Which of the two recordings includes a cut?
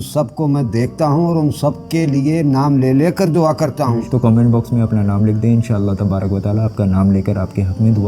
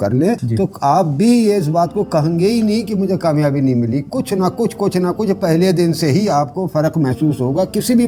first; 1 cut; at 4.1 s

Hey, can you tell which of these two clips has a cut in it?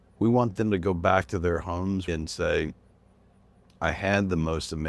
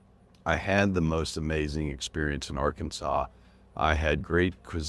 first; 1 cut; at 2.1 s

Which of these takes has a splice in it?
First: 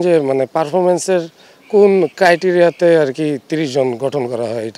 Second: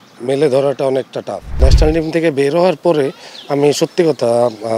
second; 1 cut; at 1.6 s

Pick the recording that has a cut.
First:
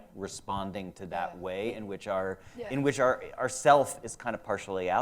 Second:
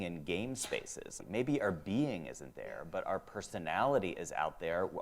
second; 1 cut; at 1.2 s

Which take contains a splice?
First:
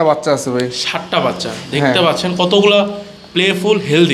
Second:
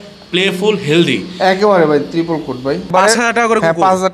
second; 1 cut; at 3.1 s

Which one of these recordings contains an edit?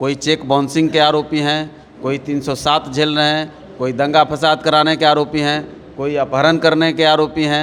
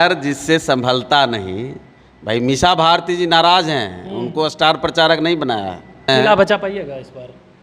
second; 1 cut; at 6.1 s

